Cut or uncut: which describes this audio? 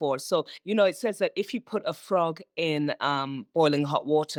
uncut